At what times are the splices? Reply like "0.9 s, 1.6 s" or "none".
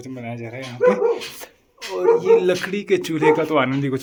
none